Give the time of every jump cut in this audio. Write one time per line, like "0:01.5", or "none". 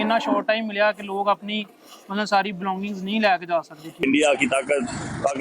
0:04.0

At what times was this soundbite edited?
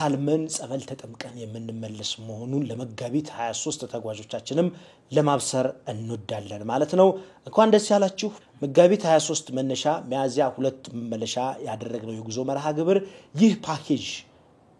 none

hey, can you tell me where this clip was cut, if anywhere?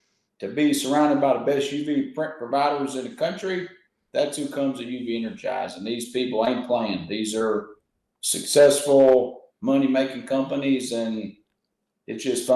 none

